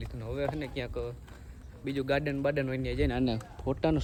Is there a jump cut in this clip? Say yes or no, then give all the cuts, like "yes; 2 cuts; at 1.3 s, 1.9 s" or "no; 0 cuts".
no; 0 cuts